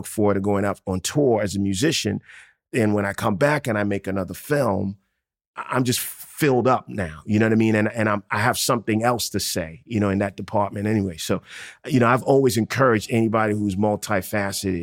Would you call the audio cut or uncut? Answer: cut